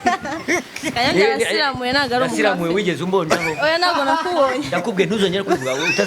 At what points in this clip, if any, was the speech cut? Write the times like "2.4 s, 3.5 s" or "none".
none